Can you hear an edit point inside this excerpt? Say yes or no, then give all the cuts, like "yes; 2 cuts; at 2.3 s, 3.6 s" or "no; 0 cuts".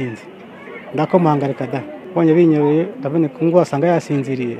yes; 1 cut; at 2.0 s